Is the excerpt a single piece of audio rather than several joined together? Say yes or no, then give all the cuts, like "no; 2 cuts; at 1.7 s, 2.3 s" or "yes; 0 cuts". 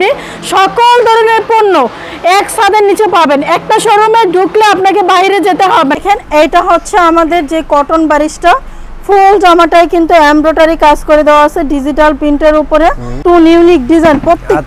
no; 2 cuts; at 6.0 s, 13.1 s